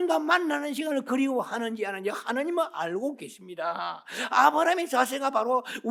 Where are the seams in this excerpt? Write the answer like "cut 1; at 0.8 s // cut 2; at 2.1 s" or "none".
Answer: none